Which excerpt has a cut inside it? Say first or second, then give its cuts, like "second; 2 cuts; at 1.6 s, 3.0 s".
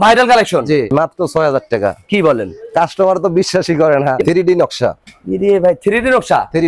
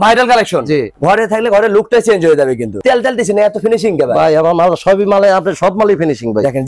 first; 2 cuts; at 0.9 s, 4.2 s